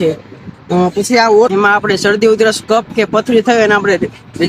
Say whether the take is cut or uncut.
cut